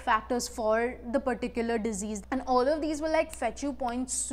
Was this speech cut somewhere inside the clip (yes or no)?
yes